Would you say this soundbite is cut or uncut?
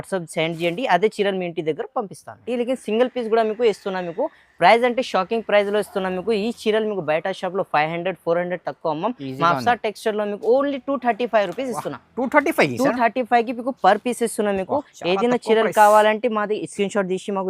cut